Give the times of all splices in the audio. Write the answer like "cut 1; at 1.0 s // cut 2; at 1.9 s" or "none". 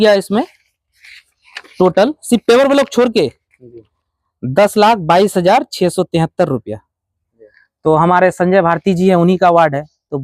cut 1; at 6.9 s